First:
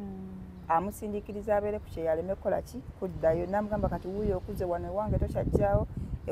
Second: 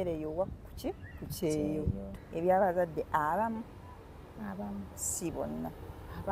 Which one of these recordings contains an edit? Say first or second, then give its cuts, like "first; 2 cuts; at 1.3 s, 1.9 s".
second; 1 cut; at 2.0 s